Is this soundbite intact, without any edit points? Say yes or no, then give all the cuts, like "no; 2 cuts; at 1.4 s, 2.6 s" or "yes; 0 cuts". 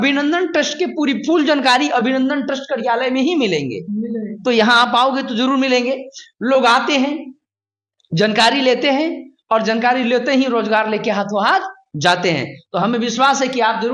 yes; 0 cuts